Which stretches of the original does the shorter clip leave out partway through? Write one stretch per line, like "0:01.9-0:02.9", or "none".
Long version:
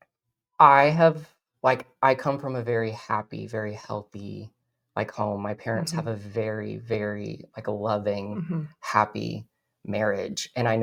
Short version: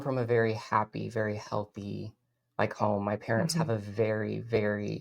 none